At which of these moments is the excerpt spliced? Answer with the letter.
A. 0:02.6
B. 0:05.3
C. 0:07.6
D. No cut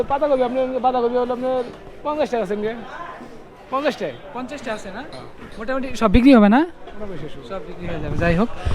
D